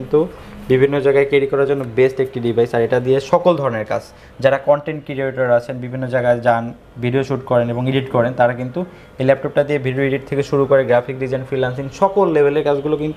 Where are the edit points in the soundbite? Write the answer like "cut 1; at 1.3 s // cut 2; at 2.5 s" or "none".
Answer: none